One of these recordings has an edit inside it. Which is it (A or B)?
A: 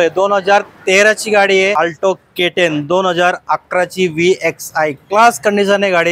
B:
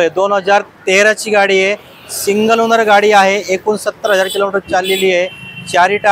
A